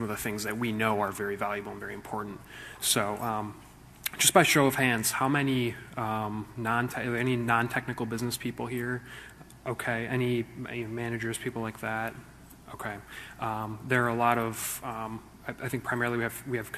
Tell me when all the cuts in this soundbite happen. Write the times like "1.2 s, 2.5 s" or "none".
10.3 s